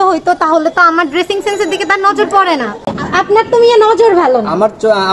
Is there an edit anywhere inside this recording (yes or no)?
yes